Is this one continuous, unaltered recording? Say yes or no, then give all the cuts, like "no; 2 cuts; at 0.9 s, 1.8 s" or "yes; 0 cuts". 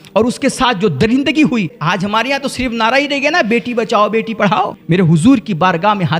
no; 2 cuts; at 1.8 s, 4.8 s